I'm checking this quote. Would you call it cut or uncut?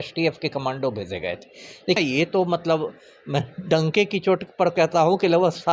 cut